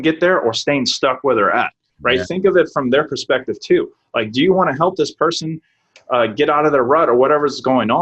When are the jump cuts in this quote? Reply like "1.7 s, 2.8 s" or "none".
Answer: none